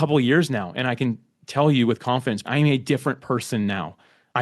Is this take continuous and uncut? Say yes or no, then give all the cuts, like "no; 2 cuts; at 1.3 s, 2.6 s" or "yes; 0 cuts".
no; 1 cut; at 2.4 s